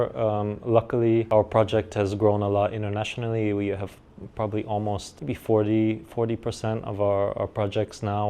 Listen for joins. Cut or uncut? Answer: cut